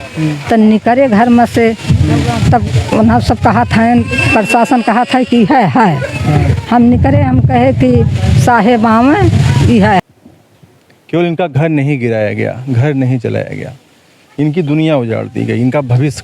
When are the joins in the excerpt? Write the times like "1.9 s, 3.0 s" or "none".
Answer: 10.0 s